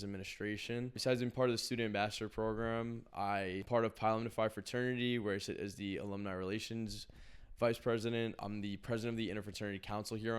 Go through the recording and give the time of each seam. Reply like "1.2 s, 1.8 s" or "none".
1.0 s, 3.6 s, 8.4 s